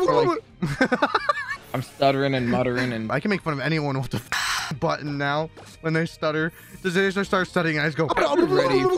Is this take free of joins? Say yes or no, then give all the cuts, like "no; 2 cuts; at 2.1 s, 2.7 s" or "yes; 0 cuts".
no; 2 cuts; at 1.3 s, 3.1 s